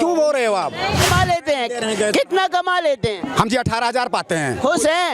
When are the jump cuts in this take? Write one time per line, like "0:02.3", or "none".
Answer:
0:01.1